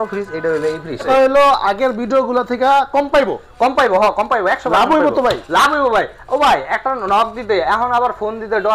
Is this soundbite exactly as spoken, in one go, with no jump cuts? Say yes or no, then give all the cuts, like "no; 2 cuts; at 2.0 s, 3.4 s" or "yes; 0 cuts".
no; 1 cut; at 1.1 s